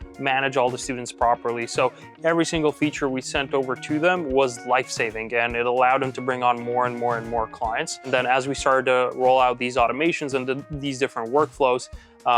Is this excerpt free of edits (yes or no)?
no